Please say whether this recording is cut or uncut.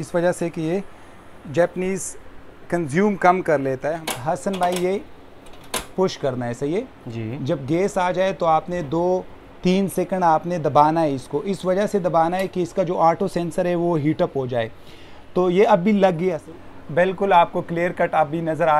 cut